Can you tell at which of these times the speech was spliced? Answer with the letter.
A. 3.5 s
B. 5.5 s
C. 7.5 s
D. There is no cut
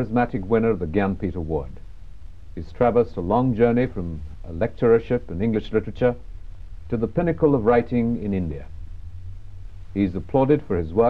B